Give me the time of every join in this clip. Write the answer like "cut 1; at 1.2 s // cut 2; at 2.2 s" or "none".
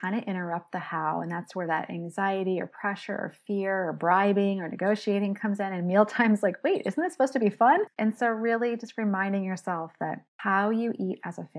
cut 1; at 7.9 s // cut 2; at 10.3 s